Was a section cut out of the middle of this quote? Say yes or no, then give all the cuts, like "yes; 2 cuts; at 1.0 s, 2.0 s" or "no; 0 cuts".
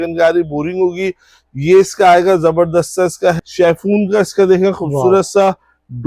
yes; 1 cut; at 3.4 s